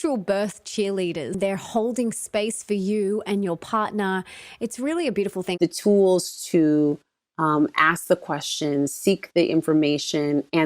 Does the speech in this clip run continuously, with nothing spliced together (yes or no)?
no